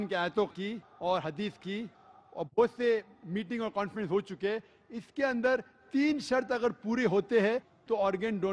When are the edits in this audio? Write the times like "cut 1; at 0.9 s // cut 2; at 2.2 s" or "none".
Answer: cut 1; at 5.6 s